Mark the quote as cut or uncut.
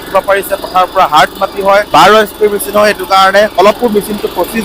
cut